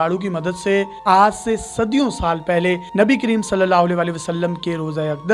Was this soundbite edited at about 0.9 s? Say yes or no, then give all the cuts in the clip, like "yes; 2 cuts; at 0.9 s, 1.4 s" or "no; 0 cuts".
yes; 1 cut; at 0.9 s